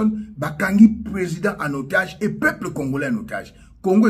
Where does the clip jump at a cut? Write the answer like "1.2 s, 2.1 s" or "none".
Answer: none